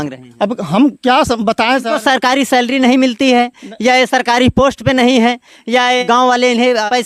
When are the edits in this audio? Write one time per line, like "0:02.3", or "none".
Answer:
none